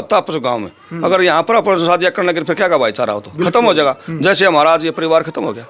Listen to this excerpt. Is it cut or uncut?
uncut